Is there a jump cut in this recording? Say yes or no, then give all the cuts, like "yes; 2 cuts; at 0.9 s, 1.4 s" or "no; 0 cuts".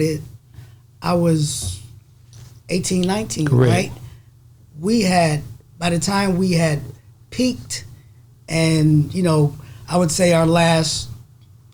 no; 0 cuts